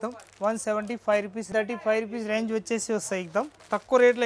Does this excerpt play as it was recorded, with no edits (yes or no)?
no